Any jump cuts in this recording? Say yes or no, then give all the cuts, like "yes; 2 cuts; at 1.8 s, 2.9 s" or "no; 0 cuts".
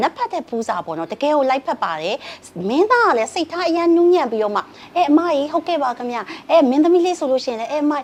no; 0 cuts